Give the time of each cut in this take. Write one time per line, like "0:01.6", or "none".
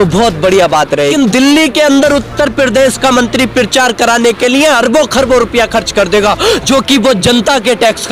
0:01.1